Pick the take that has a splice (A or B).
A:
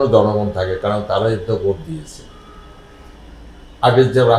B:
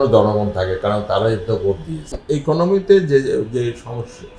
B